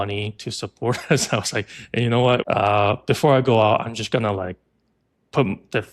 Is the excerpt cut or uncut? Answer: cut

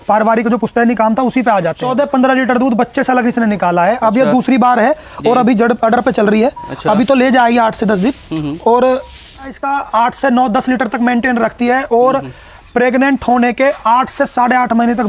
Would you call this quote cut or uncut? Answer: cut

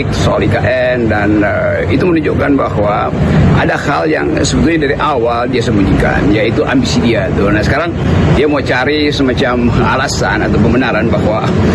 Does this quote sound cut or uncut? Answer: uncut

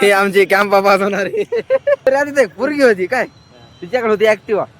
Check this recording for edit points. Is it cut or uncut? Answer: cut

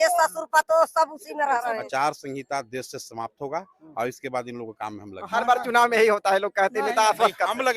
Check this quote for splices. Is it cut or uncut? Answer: cut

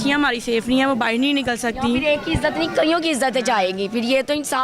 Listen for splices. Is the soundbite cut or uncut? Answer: uncut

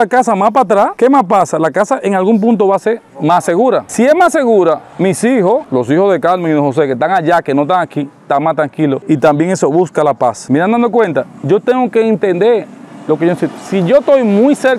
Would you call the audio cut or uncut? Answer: uncut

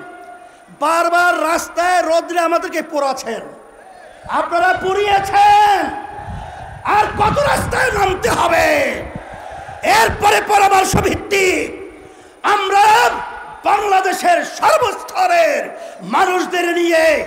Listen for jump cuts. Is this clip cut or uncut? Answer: uncut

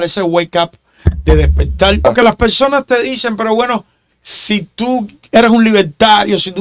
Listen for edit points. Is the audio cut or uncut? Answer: cut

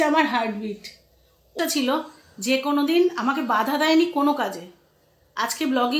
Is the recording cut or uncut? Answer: cut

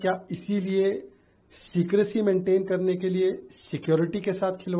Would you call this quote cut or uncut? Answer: uncut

